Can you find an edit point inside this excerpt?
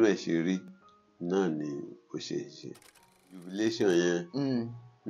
yes; 1 cut; at 3.3 s

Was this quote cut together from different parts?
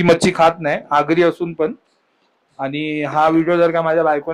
no; 0 cuts

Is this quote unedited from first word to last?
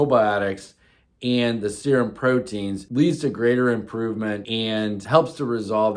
no; 2 cuts; at 2.8 s, 4.7 s

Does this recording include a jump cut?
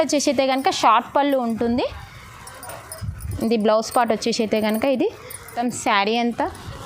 yes; 1 cut; at 5.5 s

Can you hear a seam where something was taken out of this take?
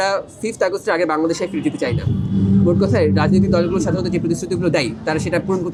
no; 0 cuts

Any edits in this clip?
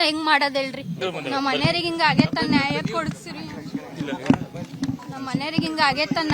yes; 1 cut; at 0.9 s

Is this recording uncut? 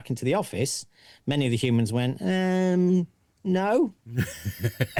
yes; 0 cuts

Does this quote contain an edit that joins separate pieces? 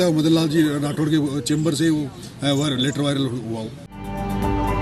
no; 0 cuts

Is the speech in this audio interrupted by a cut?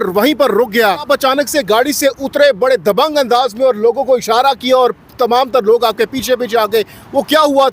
yes; 1 cut; at 1.0 s

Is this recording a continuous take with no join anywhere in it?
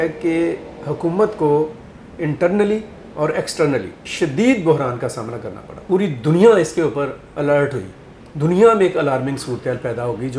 no; 2 cuts; at 4.0 s, 5.8 s

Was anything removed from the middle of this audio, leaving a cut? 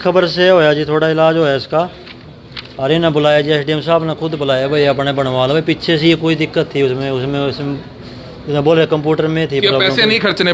no; 0 cuts

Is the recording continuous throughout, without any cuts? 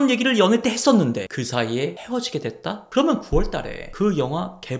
no; 1 cut; at 1.3 s

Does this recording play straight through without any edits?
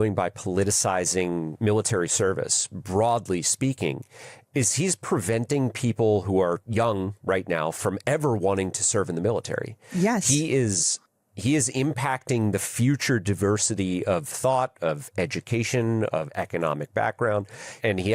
no; 1 cut; at 1.5 s

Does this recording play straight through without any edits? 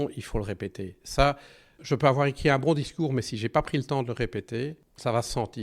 no; 1 cut; at 4.6 s

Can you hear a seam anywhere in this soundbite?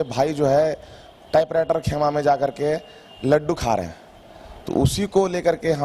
no; 0 cuts

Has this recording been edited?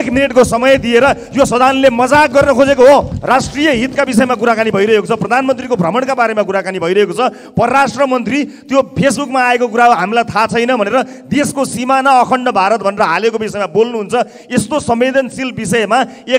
yes; 1 cut; at 3.1 s

